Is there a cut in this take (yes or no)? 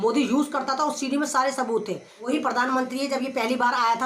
yes